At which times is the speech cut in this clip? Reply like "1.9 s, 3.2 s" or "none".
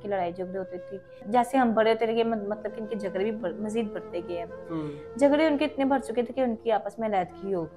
1.2 s